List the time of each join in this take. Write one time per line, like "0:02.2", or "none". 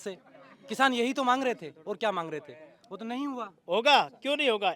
none